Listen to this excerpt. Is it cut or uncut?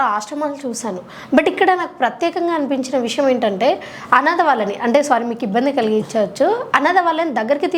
uncut